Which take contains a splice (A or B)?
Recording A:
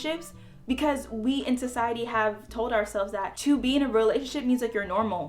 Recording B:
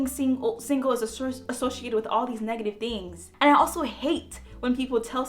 B